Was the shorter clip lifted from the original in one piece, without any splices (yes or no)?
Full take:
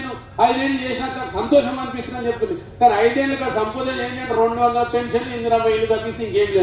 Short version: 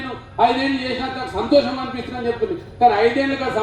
yes